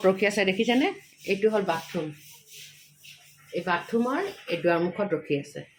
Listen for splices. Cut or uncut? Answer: uncut